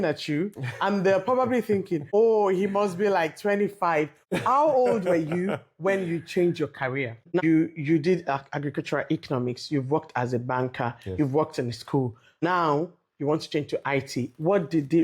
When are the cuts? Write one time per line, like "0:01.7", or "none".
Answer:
0:07.4
0:12.4